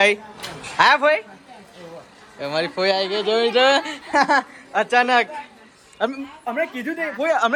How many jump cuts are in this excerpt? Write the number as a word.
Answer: zero